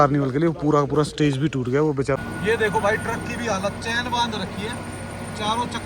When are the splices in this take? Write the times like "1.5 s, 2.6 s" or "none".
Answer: 2.2 s

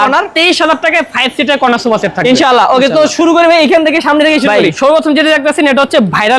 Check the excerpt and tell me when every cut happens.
none

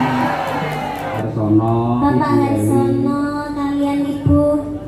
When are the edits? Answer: 1.2 s

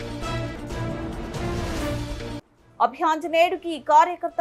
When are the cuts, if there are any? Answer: 2.3 s

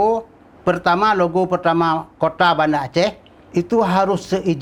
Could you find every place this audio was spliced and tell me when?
none

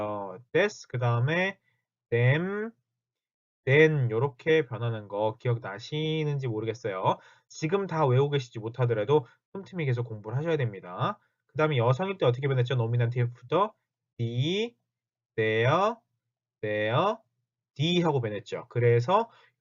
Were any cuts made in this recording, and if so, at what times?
15.8 s

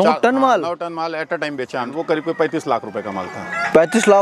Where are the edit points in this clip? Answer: 1.8 s

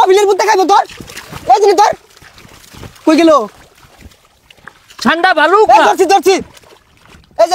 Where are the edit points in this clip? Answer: none

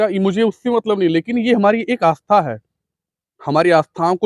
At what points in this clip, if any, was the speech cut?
none

